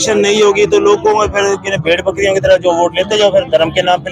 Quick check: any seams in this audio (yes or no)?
no